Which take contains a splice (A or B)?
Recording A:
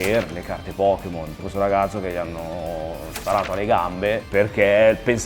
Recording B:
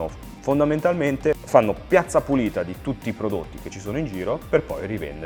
A